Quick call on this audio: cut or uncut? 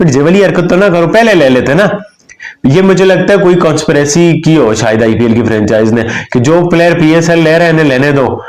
uncut